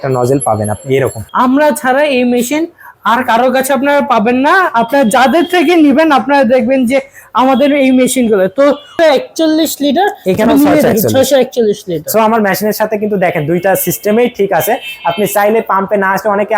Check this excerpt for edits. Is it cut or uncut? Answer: cut